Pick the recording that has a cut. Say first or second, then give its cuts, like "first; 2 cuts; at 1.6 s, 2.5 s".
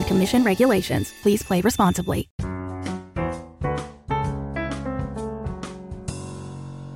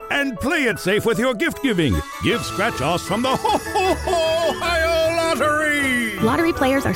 first; 1 cut; at 2.3 s